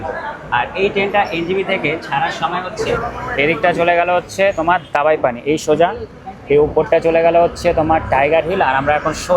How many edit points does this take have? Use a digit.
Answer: 1